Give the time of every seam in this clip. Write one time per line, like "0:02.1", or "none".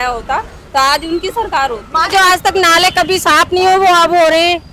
0:02.1